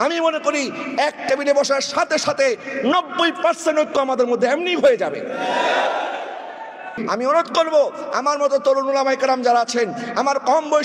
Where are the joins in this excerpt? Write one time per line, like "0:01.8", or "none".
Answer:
0:06.9